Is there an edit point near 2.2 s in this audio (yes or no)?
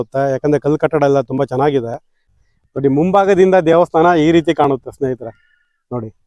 yes